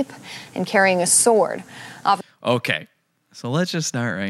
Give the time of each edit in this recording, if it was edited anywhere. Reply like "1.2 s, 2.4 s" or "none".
none